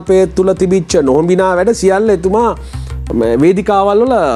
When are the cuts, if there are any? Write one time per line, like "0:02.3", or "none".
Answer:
none